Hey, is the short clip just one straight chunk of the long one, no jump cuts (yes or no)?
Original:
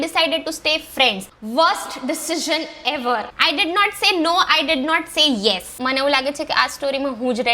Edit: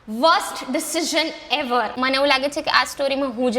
no